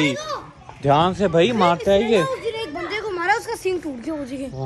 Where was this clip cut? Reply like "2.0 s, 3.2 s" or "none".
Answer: none